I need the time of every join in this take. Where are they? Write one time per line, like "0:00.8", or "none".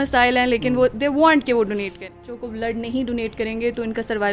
0:02.4